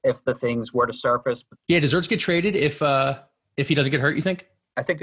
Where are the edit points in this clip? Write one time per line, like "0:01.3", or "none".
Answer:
0:01.5